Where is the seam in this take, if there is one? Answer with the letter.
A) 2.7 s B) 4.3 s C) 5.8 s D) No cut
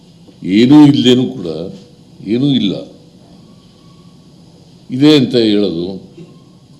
A